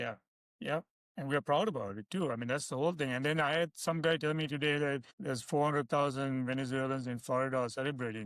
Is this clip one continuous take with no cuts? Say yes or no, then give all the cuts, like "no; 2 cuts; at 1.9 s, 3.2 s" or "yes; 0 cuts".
no; 2 cuts; at 1.0 s, 5.1 s